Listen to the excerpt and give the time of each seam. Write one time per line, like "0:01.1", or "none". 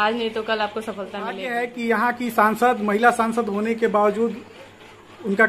0:01.5